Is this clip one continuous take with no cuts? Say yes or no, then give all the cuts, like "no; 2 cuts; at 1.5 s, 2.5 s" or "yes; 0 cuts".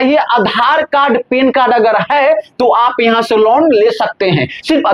yes; 0 cuts